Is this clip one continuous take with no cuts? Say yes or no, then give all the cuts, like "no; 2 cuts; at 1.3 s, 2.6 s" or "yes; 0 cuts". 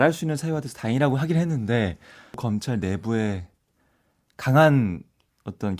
no; 1 cut; at 2.4 s